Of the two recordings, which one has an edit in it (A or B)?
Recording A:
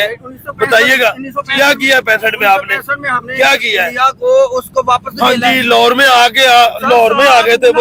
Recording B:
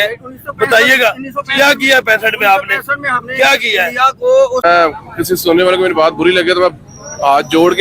B